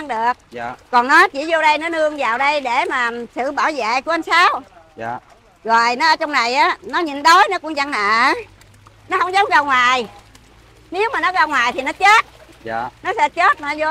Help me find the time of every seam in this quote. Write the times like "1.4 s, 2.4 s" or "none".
none

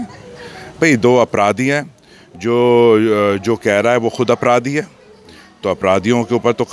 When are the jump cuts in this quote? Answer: none

